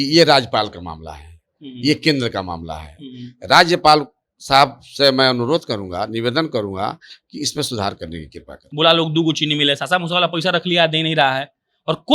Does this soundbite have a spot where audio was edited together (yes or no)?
yes